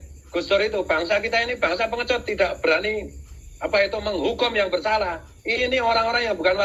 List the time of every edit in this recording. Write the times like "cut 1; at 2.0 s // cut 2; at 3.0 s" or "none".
none